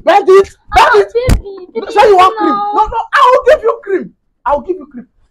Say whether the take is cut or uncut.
uncut